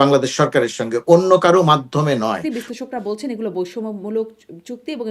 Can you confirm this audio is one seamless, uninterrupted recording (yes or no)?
no